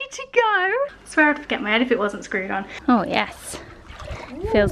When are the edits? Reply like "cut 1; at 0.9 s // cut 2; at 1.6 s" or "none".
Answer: cut 1; at 1.0 s // cut 2; at 2.7 s

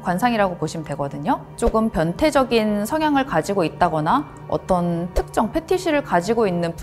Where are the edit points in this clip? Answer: cut 1; at 1.5 s

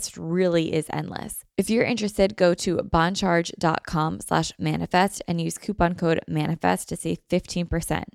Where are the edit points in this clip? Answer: cut 1; at 1.4 s

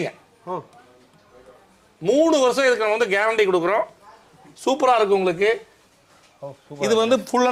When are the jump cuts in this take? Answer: none

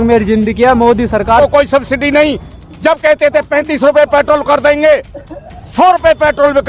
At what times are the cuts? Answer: cut 1; at 1.4 s

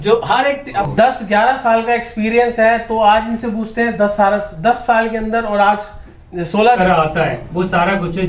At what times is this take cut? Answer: cut 1; at 0.9 s // cut 2; at 6.8 s

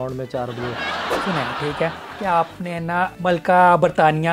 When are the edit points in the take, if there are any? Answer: cut 1; at 1.2 s // cut 2; at 3.1 s

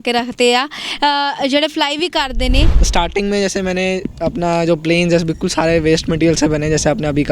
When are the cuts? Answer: cut 1; at 2.8 s

